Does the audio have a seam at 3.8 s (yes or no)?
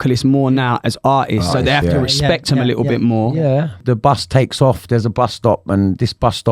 yes